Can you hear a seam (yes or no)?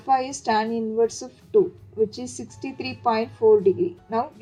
no